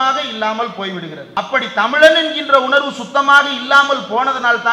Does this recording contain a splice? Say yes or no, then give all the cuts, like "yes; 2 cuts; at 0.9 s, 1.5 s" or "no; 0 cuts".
yes; 1 cut; at 1.3 s